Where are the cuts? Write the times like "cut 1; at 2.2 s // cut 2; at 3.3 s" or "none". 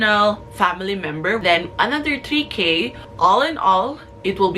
cut 1; at 1.4 s // cut 2; at 3.0 s